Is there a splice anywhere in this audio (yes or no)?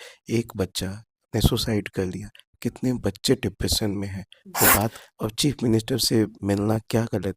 yes